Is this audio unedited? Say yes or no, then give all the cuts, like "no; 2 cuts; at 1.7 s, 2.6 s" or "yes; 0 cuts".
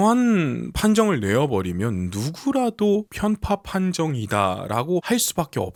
yes; 0 cuts